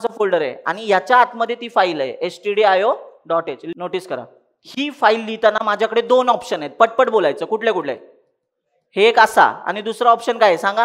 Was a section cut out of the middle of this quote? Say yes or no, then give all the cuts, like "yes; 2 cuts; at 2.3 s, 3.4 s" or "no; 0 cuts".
yes; 1 cut; at 3.6 s